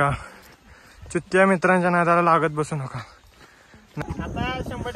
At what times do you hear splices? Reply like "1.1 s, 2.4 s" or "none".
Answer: 3.9 s